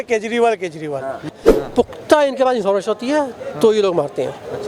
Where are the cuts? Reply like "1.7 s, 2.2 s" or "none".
1.3 s